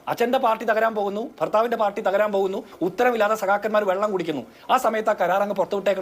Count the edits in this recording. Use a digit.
1